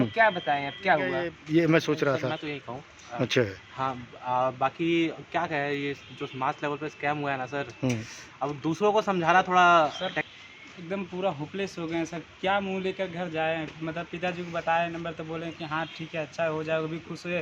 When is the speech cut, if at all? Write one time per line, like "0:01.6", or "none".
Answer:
0:01.3
0:10.1